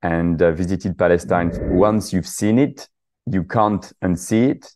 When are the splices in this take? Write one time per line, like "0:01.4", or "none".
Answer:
0:01.5